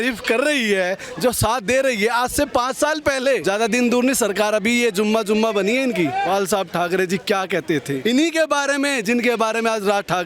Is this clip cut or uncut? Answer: cut